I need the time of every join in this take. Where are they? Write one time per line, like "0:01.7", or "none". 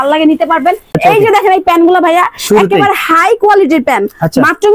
0:01.0

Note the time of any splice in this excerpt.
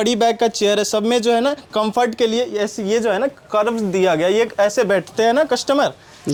none

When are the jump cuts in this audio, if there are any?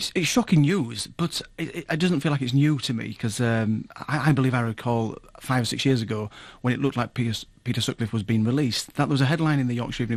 none

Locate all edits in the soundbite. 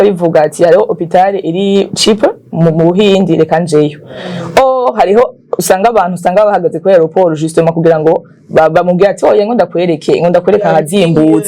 none

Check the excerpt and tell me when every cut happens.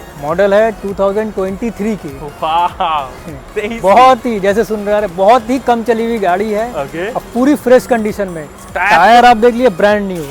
none

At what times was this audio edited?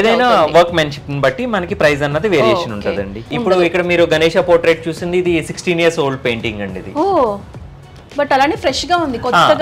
0:03.3

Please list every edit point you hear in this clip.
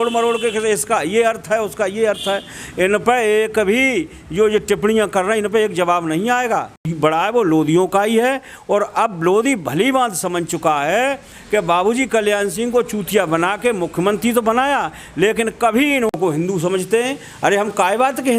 0:06.9
0:16.1

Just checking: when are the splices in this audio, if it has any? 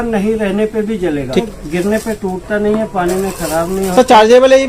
0:01.4

